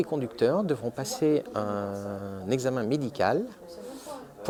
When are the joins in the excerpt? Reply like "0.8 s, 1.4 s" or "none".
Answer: none